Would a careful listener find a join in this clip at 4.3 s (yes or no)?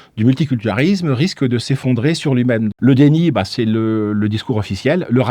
no